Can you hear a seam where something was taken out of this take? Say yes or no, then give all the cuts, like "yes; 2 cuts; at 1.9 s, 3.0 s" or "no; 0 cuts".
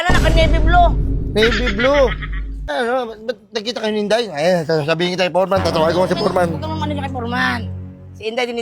yes; 1 cut; at 2.7 s